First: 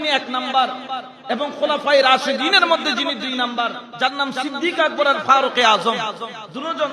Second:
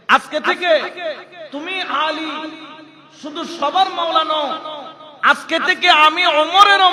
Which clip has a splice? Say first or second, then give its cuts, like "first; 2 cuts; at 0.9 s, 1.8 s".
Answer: first; 1 cut; at 3.8 s